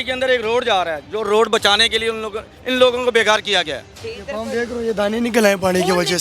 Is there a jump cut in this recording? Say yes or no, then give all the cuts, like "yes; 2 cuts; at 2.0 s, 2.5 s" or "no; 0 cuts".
yes; 1 cut; at 4.1 s